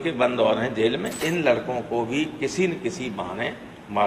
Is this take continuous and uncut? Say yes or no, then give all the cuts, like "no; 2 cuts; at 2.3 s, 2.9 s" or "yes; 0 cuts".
no; 1 cut; at 1.2 s